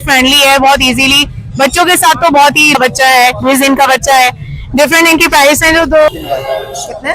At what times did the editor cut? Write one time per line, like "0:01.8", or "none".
0:02.7
0:06.1

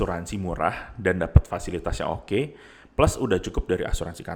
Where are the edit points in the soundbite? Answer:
none

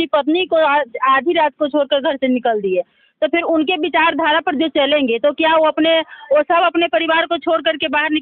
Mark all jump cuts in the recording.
none

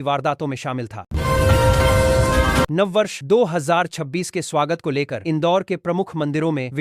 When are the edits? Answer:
0:01.0
0:02.7

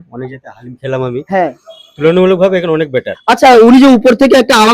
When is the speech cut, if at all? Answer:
none

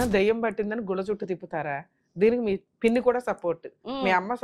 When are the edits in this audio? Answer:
0:02.7

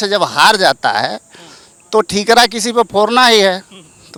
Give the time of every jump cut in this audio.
none

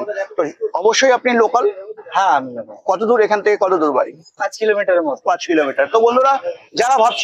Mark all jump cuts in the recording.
none

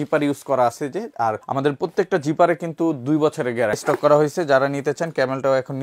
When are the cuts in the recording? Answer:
0:01.4
0:03.8

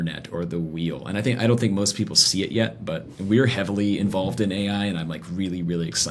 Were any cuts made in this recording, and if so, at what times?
0:03.1

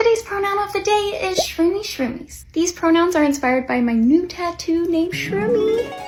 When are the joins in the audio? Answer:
none

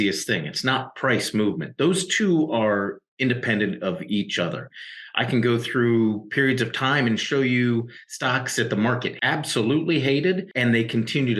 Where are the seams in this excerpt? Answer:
0:09.1
0:10.5

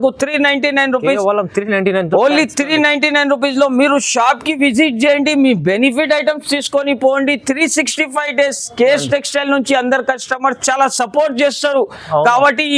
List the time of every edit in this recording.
none

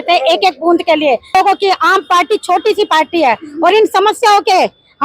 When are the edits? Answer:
0:01.3

